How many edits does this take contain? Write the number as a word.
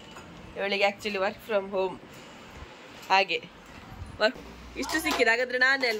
one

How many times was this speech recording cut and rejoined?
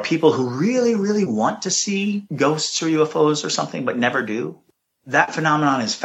one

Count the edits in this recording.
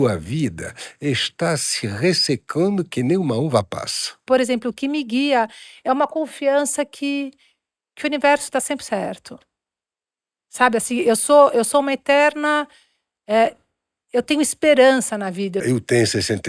two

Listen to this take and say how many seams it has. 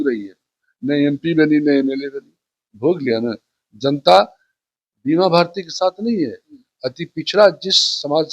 zero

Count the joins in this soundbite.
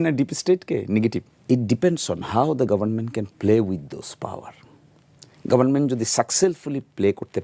one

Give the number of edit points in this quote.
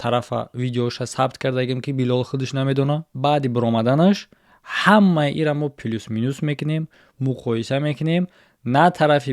one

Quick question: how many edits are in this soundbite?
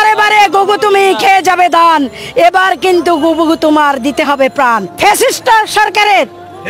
one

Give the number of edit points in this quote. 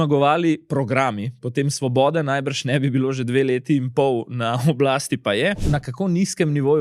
one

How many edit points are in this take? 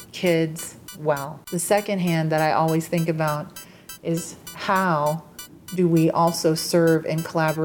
one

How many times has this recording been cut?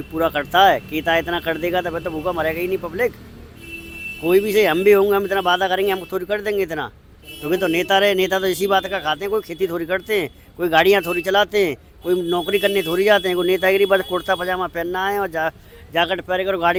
zero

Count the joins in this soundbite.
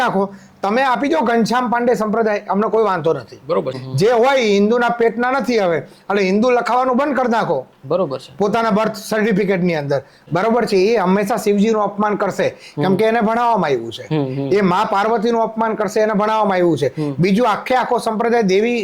two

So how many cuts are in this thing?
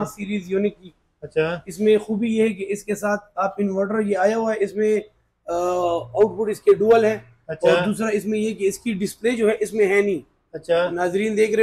zero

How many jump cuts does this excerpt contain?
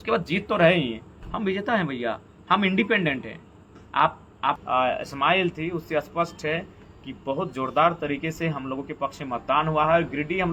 one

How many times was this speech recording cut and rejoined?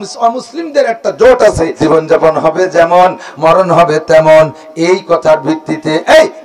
one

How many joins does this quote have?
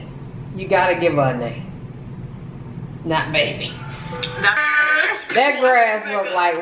one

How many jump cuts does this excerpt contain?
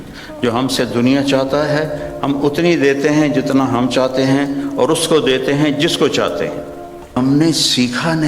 one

